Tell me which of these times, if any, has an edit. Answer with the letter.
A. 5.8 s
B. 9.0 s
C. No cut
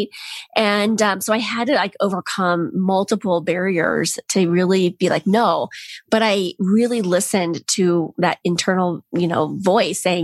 B